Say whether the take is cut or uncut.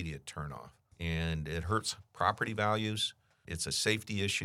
cut